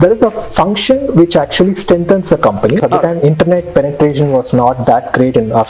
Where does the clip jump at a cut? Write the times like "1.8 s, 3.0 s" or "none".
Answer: 2.8 s